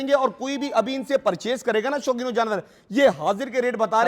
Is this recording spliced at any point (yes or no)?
no